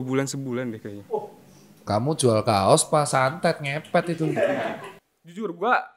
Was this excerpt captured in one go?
no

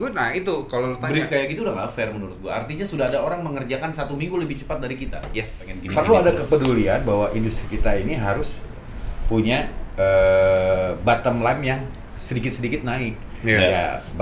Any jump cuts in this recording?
yes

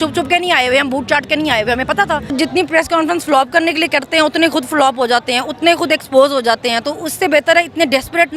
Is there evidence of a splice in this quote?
yes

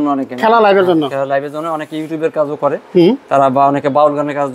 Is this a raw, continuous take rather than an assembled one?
yes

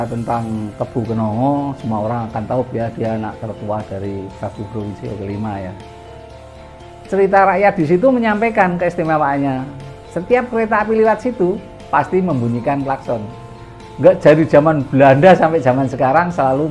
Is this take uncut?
no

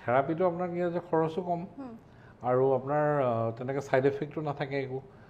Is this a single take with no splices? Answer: yes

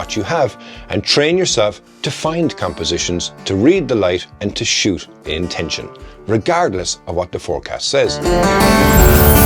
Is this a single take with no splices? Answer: no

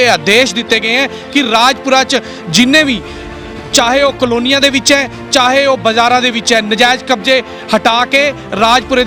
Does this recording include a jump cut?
no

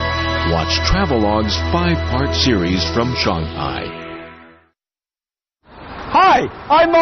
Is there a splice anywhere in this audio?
yes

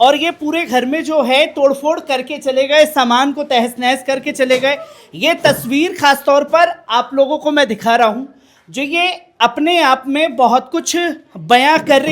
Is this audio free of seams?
yes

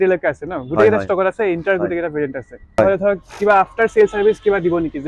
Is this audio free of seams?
no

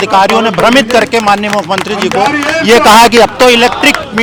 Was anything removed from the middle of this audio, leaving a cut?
no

